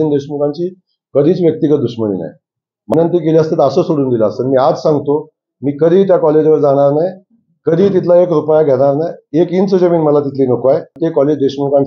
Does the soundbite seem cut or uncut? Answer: cut